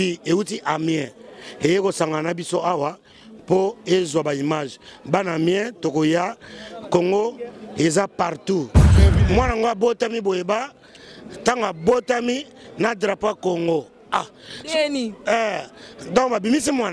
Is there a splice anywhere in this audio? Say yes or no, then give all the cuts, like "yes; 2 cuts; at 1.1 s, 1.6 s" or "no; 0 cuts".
yes; 1 cut; at 8.9 s